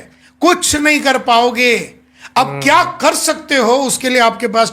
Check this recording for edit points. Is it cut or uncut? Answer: uncut